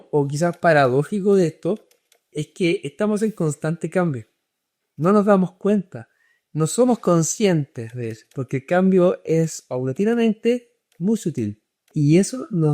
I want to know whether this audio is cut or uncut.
cut